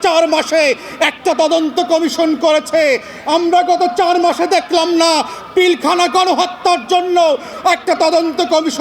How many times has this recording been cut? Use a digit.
1